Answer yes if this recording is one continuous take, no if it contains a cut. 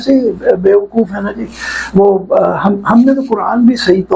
yes